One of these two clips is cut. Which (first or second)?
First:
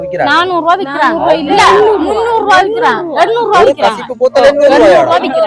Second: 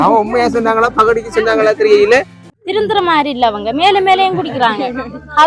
second